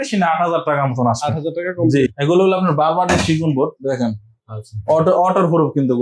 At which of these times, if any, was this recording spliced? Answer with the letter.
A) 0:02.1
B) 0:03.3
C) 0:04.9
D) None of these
A